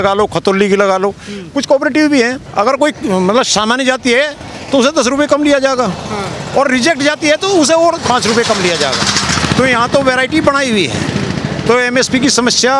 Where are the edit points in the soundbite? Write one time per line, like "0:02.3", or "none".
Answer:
0:02.4